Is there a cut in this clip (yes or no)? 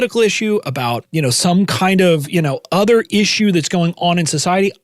yes